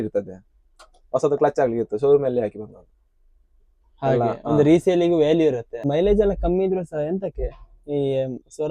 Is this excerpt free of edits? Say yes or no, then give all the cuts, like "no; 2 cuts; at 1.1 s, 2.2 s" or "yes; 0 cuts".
no; 1 cut; at 5.7 s